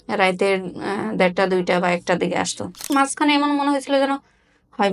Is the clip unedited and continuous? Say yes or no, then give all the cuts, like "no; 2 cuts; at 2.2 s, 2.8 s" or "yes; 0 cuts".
no; 1 cut; at 2.9 s